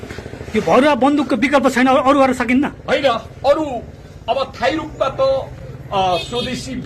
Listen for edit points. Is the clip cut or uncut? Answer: uncut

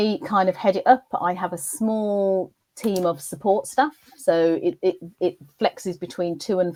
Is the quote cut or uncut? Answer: uncut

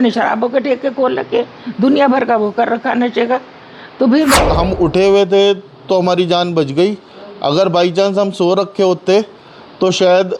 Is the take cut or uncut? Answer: cut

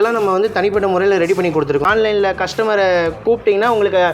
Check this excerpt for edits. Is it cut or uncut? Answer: cut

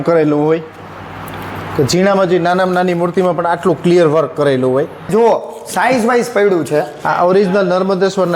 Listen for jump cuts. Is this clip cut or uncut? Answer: cut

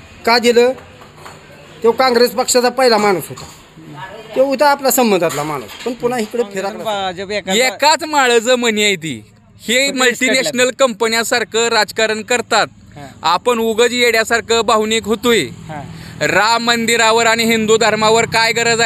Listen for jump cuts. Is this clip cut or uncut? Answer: cut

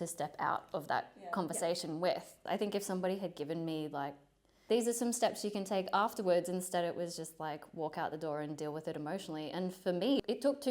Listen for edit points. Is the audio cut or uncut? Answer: cut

